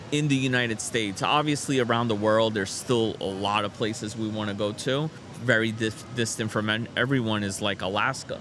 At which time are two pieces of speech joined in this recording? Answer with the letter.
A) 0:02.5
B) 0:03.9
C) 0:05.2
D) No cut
C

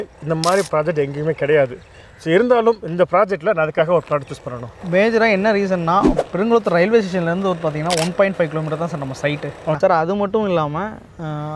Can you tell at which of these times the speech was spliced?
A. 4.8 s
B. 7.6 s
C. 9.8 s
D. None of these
C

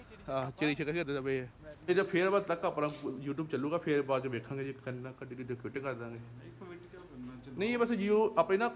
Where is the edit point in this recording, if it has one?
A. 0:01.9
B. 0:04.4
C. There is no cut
A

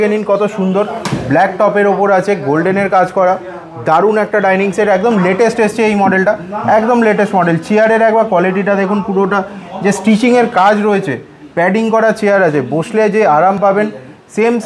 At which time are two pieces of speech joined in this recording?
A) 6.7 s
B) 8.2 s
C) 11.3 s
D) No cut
D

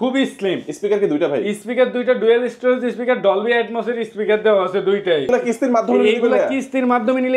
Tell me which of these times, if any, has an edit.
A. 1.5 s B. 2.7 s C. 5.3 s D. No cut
C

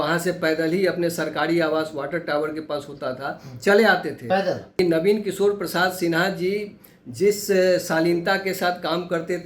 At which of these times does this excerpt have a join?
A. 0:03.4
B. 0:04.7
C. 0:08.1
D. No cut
B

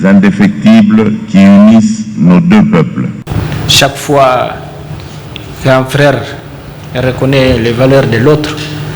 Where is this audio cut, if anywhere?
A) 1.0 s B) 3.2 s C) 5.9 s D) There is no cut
B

